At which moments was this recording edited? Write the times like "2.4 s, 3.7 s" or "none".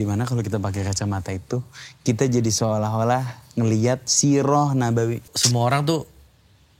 5.3 s